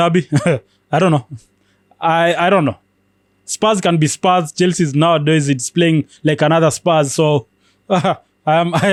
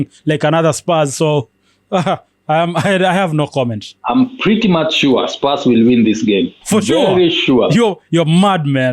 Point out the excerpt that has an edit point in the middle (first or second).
second